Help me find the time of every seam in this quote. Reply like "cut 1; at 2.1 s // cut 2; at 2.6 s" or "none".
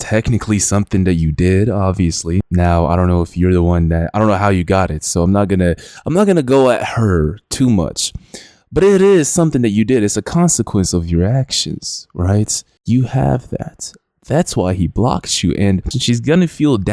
none